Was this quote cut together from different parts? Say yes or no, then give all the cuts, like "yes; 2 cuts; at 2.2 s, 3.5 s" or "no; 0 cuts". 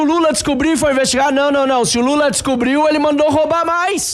no; 0 cuts